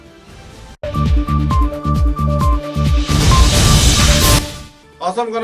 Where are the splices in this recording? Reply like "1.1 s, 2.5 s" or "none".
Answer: none